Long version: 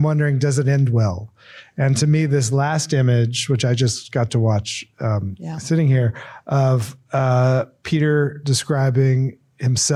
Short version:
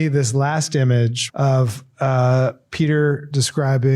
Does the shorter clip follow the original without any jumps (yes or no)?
no